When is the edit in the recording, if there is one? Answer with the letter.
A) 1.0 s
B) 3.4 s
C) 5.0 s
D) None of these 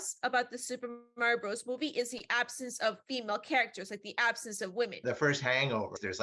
C